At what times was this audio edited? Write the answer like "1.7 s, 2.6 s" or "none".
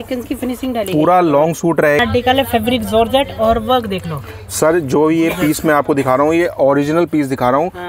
2.0 s